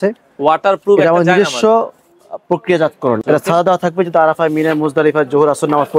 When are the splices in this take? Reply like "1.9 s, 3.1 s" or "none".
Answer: 3.2 s